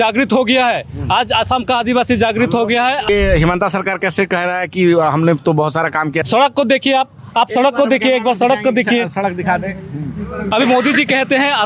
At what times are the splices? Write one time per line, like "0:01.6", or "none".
0:03.1
0:06.2
0:10.5